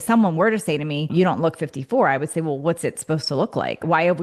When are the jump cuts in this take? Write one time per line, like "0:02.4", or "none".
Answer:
0:01.0